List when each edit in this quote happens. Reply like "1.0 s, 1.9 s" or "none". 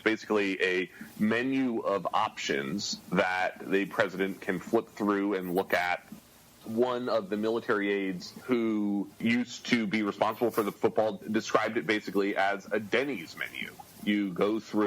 8.3 s, 9.1 s, 10.7 s

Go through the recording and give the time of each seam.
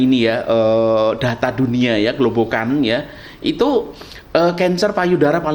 none

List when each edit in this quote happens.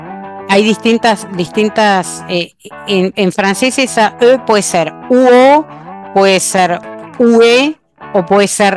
none

